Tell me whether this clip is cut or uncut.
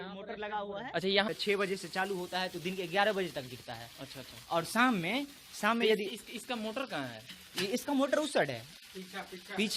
cut